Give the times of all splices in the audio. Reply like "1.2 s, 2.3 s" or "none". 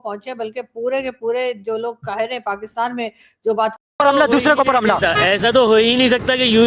3.9 s